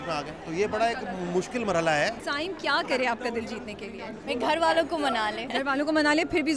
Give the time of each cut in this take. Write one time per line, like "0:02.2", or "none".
0:02.2
0:04.1
0:05.5